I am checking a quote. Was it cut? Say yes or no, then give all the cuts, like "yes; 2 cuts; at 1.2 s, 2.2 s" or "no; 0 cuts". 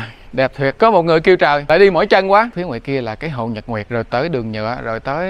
yes; 4 cuts; at 0.7 s, 1.6 s, 2.5 s, 3.9 s